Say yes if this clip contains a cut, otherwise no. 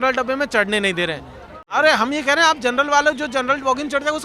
yes